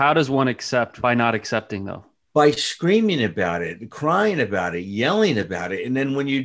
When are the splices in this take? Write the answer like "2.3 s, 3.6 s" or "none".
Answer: 1.0 s